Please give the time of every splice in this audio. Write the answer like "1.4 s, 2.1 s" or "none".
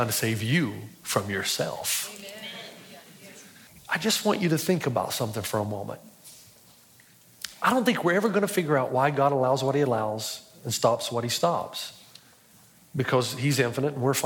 3.7 s